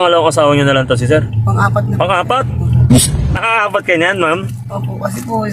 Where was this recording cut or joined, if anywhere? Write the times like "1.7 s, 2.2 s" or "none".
3.0 s